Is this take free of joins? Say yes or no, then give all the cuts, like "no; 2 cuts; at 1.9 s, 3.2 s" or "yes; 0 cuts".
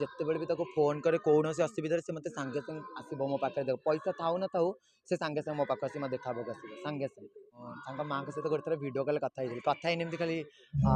no; 1 cut; at 7.6 s